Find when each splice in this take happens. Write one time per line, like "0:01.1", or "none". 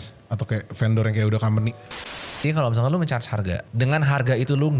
0:02.2
0:03.7